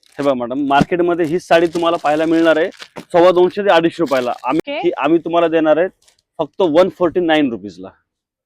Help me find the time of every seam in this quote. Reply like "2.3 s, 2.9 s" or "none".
4.6 s